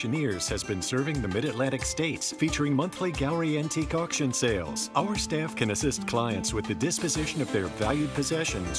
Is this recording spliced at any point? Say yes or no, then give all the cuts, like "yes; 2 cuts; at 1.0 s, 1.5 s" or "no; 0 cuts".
no; 0 cuts